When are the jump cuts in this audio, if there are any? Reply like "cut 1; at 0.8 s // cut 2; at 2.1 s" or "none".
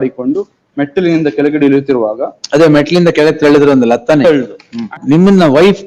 cut 1; at 4.9 s